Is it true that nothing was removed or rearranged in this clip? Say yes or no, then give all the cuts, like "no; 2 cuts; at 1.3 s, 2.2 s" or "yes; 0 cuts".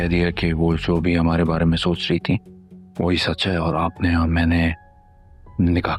yes; 0 cuts